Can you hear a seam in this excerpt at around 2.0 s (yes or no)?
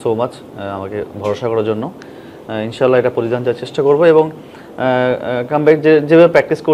no